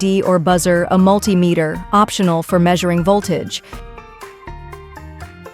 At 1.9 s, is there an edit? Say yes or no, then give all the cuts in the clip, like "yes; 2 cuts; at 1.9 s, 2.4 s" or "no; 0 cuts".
no; 1 cut; at 3.6 s